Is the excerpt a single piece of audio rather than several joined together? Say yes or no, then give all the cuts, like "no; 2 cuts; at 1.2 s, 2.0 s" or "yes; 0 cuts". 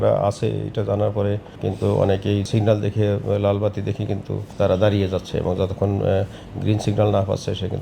no; 3 cuts; at 1.5 s, 2.5 s, 4.4 s